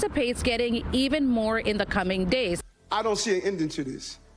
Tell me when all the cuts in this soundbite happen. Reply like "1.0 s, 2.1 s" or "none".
2.6 s